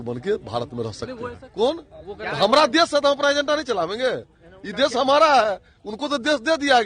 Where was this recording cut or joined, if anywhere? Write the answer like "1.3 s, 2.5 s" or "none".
1.4 s